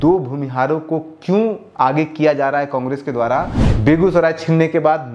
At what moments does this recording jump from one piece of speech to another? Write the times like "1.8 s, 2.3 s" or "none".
3.6 s